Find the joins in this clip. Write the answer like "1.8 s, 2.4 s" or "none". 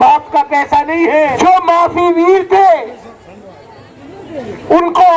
1.3 s